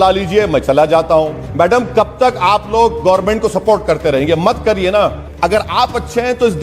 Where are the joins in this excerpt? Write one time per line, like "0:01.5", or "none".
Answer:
0:01.4
0:05.2